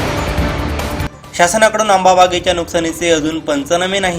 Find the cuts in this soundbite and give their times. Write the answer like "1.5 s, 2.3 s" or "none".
1.0 s